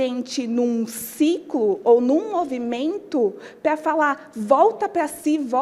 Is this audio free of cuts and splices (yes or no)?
yes